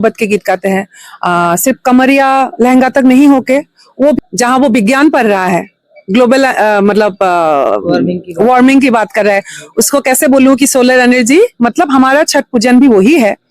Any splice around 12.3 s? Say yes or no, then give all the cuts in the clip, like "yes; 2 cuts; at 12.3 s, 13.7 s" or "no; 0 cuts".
no; 1 cut; at 4.2 s